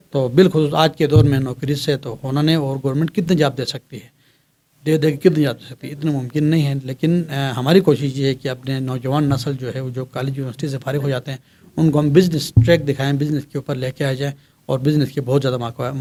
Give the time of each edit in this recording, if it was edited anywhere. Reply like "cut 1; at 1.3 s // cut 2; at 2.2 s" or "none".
none